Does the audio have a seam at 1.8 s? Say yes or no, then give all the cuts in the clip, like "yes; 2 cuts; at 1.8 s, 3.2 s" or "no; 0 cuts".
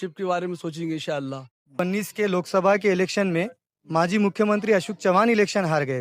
yes; 1 cut; at 1.8 s